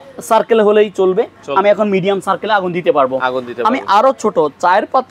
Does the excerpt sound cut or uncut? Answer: uncut